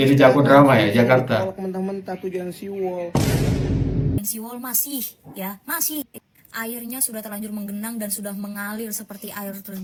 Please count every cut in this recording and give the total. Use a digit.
0